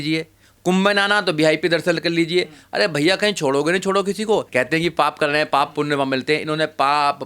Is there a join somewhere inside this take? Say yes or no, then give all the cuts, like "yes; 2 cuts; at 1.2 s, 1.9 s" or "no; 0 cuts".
yes; 1 cut; at 4.5 s